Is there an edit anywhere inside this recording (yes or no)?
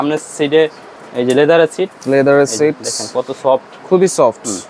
no